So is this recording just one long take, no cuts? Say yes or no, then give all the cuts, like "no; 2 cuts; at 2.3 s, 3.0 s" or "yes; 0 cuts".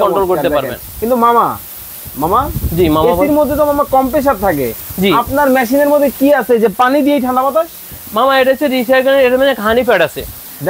yes; 0 cuts